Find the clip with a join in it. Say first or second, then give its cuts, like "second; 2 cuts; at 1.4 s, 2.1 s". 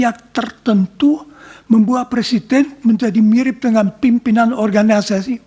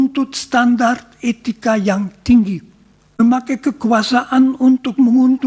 second; 1 cut; at 3.2 s